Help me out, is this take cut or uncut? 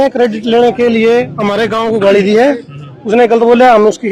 uncut